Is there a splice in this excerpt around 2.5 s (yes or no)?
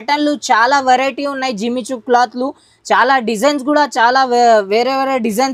no